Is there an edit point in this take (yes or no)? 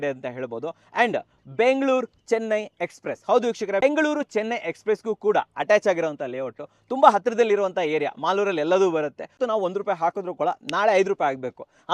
yes